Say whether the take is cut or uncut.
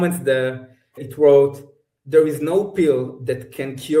cut